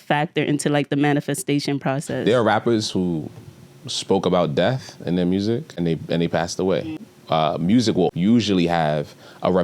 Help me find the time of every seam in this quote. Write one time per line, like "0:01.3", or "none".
0:02.1
0:05.7
0:07.1
0:08.1